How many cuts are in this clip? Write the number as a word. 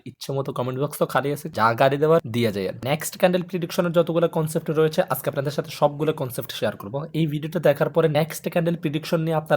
one